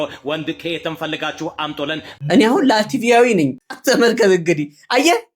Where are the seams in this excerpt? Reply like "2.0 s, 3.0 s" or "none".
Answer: 2.1 s, 3.7 s

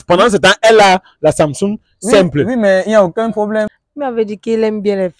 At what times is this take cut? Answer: 3.7 s

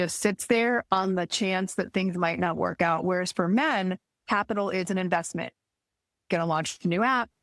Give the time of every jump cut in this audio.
none

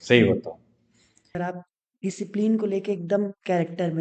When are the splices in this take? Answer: 1.4 s

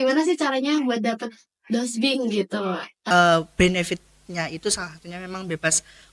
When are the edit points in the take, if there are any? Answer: 3.0 s

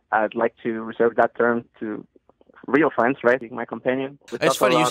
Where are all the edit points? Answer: 1.7 s, 4.0 s

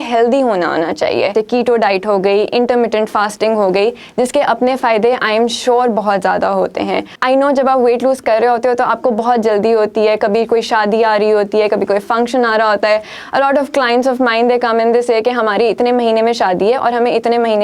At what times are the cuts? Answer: 1.3 s, 7.1 s

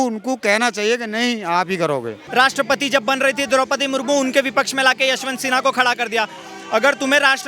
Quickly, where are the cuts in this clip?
2.2 s

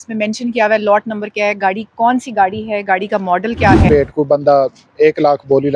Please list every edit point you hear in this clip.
3.8 s

